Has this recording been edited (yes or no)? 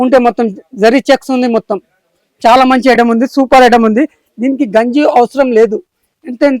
no